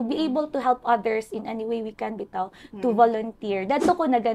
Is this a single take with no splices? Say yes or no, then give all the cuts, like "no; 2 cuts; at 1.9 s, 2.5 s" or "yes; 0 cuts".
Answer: yes; 0 cuts